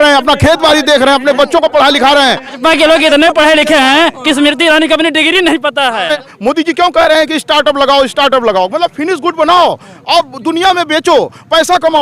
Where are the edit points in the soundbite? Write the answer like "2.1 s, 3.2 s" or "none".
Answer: 2.5 s, 6.2 s